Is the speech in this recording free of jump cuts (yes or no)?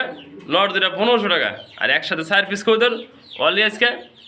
yes